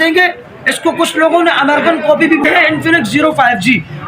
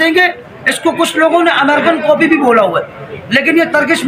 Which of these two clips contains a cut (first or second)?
first